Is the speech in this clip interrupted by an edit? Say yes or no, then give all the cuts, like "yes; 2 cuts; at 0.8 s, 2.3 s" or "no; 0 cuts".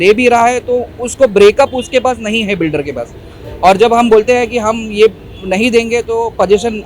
no; 0 cuts